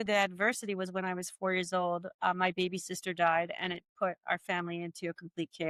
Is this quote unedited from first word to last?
yes; 0 cuts

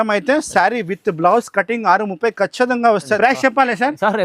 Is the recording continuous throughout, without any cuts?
no; 1 cut; at 3.2 s

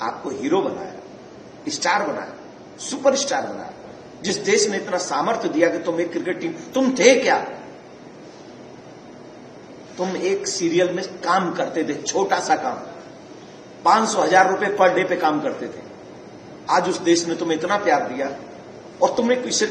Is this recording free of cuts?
yes; 0 cuts

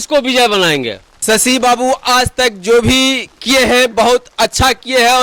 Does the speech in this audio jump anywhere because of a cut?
no; 0 cuts

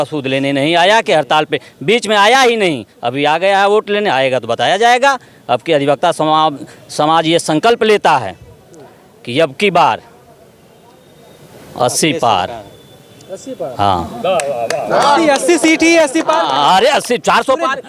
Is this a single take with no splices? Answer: yes; 0 cuts

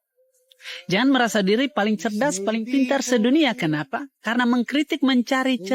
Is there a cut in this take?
no; 0 cuts

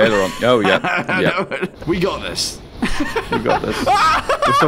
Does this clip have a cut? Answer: yes; 1 cut; at 1.8 s

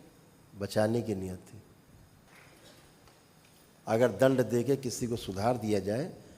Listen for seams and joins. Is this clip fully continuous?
no; 1 cut; at 2.3 s

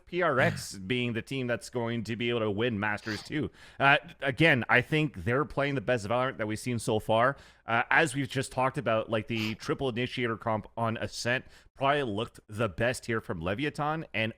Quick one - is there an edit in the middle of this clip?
no; 0 cuts

